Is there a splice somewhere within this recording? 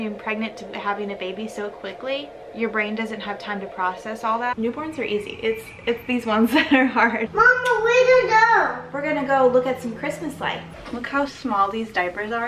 yes; 4 cuts; at 2.4 s, 4.5 s, 7.3 s, 10.7 s

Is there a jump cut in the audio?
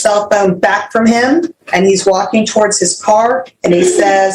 yes; 1 cut; at 1.6 s

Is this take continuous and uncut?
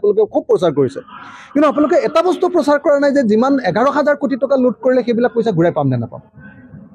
yes; 0 cuts

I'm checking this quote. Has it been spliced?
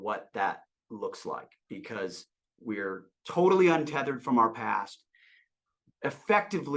no; 0 cuts

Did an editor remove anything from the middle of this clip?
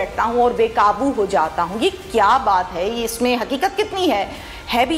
no; 0 cuts

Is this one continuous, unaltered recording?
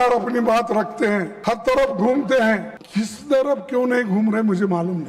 no; 2 cuts; at 1.3 s, 2.8 s

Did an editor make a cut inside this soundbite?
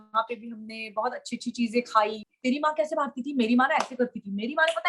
yes; 1 cut; at 2.2 s

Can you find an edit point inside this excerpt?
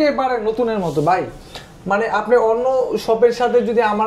no; 0 cuts

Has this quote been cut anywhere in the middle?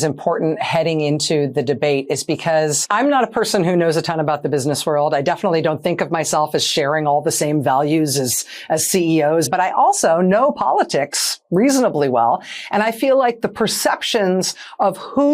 yes; 2 cuts; at 2.8 s, 9.5 s

